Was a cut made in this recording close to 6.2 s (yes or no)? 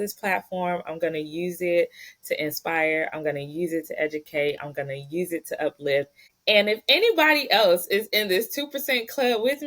yes